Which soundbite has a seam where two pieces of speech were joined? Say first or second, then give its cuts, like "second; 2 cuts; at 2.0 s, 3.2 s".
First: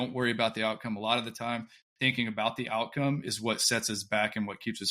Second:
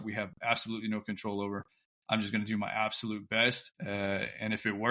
second; 1 cut; at 3.7 s